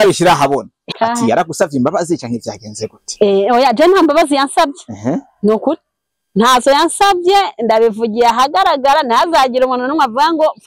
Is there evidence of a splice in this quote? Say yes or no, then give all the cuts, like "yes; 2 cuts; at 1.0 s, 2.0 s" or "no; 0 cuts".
yes; 1 cut; at 0.9 s